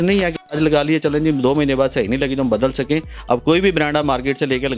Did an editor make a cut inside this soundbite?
yes; 1 cut; at 3.1 s

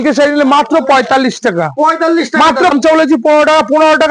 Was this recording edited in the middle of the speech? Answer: yes; 1 cut; at 2.7 s

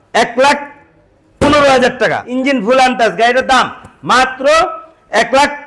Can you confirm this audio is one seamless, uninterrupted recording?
no; 1 cut; at 2.2 s

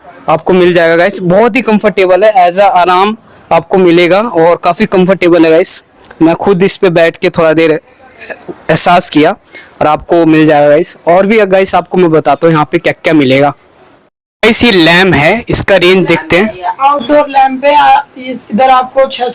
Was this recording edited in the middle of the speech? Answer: no; 0 cuts

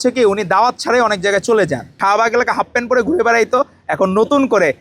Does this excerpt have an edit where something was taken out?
yes; 1 cut; at 2.0 s

